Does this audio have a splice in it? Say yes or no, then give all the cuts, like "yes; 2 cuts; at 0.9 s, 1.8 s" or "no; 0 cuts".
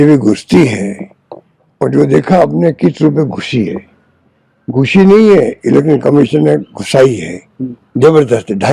no; 0 cuts